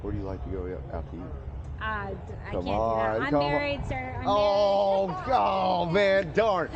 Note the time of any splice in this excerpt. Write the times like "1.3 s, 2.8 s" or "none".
none

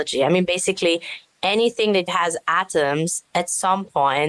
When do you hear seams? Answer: 2.1 s

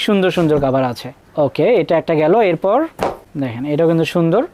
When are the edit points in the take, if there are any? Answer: none

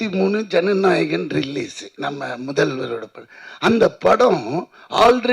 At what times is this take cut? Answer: 1.8 s

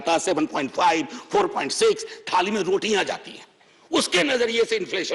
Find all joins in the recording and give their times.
none

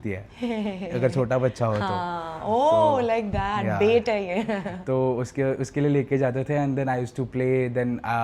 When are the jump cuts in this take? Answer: none

